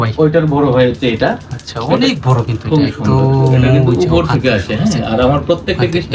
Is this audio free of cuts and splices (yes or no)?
yes